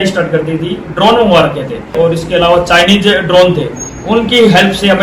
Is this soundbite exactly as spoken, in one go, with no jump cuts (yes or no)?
yes